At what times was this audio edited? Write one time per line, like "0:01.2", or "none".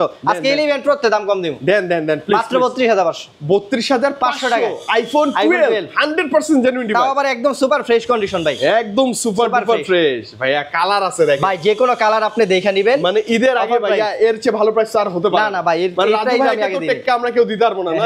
none